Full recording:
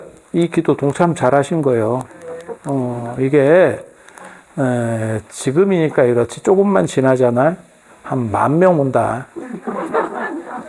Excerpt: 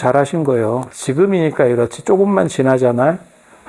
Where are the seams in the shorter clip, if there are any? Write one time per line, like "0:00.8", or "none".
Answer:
0:00.9